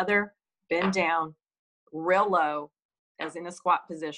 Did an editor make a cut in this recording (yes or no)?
no